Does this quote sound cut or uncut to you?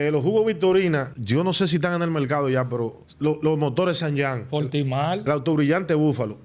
cut